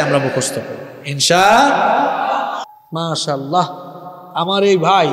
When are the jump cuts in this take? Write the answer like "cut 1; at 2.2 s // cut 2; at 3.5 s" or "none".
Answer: cut 1; at 2.8 s